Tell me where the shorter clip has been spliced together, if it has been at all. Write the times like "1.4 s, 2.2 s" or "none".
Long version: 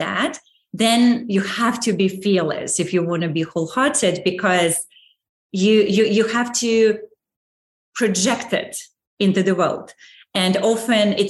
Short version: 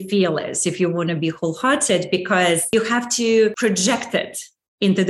2.7 s, 3.6 s